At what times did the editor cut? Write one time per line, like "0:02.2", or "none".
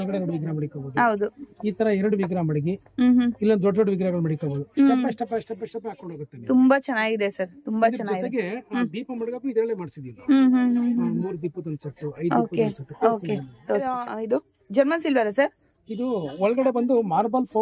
0:14.0